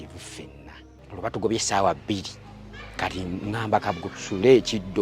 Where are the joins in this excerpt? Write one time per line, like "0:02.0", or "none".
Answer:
0:01.0